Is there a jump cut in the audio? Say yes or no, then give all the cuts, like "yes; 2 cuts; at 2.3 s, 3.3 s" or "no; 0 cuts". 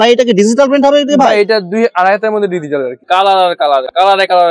yes; 1 cut; at 3.0 s